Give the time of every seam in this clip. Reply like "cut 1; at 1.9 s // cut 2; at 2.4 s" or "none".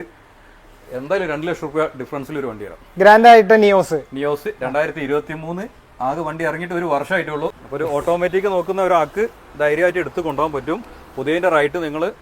cut 1; at 7.6 s